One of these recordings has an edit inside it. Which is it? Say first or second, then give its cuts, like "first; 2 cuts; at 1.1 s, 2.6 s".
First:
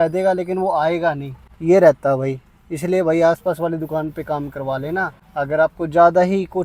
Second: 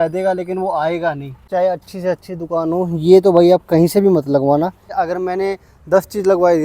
second; 2 cuts; at 1.4 s, 4.9 s